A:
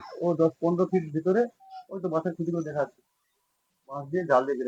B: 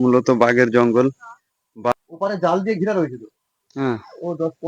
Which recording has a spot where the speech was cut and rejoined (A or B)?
B